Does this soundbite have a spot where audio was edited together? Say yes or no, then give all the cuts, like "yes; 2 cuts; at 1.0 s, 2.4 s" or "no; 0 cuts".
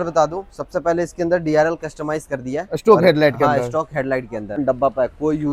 yes; 1 cut; at 4.6 s